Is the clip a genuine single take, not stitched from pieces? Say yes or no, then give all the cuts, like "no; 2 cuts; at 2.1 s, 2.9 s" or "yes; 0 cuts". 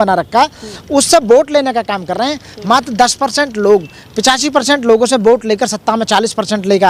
yes; 0 cuts